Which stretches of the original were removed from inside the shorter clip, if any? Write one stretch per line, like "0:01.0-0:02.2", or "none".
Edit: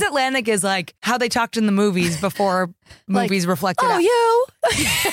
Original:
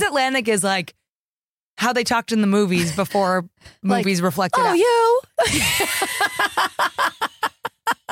0:00.9-0:01.7